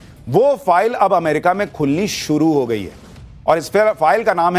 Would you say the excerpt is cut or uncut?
uncut